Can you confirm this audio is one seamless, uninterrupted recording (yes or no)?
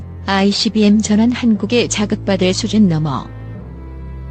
no